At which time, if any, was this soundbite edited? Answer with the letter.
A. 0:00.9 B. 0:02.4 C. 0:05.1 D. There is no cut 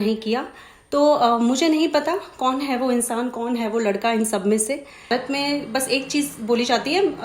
C